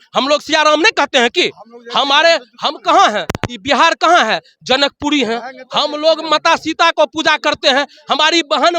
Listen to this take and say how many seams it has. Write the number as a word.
zero